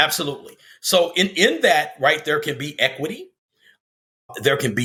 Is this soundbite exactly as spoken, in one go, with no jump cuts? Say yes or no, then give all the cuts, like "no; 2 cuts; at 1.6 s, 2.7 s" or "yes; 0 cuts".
yes; 0 cuts